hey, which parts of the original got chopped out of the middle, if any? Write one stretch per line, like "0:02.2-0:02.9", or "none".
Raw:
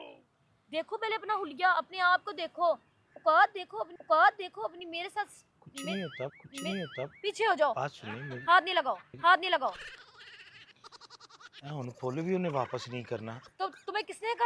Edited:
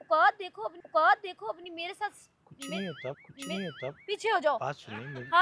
none